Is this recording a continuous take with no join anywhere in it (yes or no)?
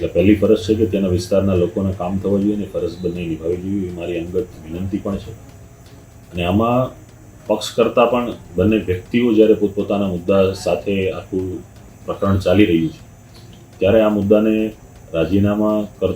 yes